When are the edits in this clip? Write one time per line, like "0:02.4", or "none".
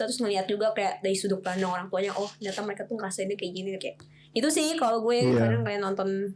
none